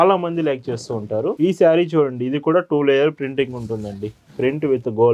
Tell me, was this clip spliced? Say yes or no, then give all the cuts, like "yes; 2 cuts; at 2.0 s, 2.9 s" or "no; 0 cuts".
yes; 1 cut; at 1.4 s